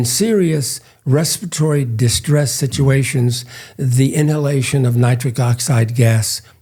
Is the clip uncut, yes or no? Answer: yes